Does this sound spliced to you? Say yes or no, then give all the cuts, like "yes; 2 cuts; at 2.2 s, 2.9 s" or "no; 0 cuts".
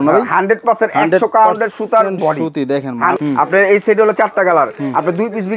yes; 1 cut; at 3.2 s